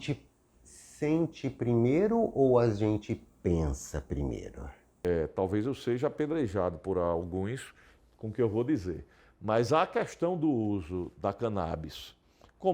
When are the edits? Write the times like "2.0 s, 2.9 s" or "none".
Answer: 4.9 s